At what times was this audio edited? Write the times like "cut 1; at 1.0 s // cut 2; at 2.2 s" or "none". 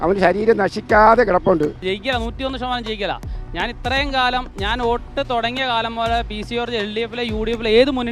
cut 1; at 1.9 s